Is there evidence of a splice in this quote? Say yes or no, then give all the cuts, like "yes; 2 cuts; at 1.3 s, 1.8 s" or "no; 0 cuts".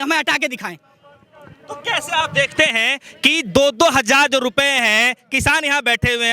no; 0 cuts